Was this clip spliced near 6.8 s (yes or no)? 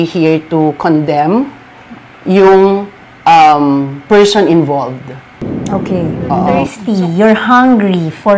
yes